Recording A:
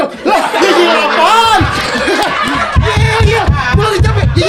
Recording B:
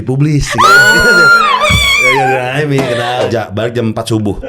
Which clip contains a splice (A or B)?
B